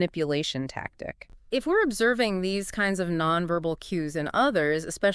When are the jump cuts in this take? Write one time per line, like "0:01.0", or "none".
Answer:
0:01.3